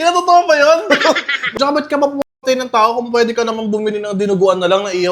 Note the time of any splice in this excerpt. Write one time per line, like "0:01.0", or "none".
0:01.5